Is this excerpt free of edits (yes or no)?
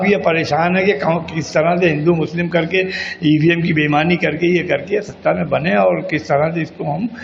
yes